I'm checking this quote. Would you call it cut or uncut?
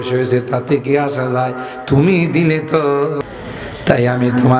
cut